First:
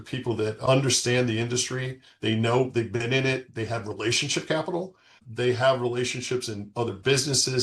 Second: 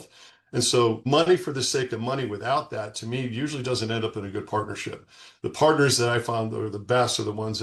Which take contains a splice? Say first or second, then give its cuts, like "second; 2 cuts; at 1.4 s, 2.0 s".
first; 1 cut; at 5.2 s